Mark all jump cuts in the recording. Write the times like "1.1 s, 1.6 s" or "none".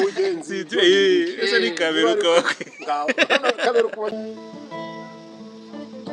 4.1 s

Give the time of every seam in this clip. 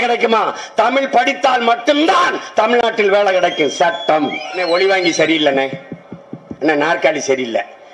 4.5 s

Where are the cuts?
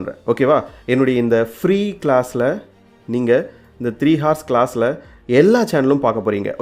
none

